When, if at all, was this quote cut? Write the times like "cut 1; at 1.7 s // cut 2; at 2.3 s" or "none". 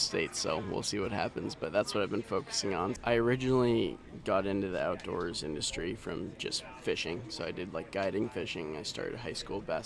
cut 1; at 2.9 s